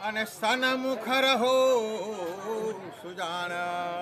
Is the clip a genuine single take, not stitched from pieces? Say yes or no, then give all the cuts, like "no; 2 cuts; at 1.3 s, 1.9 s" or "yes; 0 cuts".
yes; 0 cuts